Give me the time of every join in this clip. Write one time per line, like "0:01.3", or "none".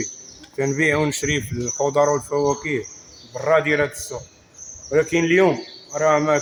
none

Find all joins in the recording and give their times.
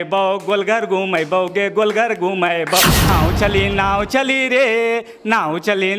0:03.1

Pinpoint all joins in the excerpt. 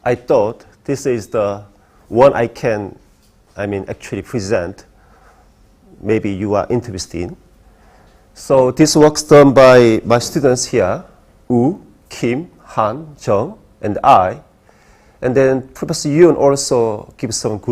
0:14.7

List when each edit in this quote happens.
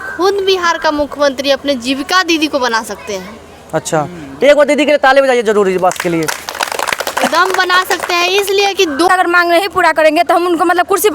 0:09.1

